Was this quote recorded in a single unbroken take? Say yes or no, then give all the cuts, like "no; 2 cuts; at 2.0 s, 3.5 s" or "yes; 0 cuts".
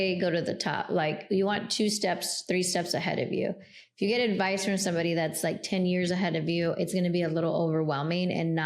yes; 0 cuts